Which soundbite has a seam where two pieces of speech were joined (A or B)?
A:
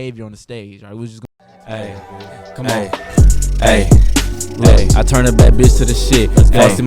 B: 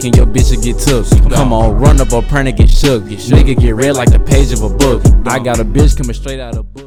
A